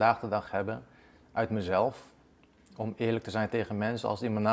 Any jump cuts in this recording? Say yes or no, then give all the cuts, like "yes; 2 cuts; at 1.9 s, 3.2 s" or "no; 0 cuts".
no; 0 cuts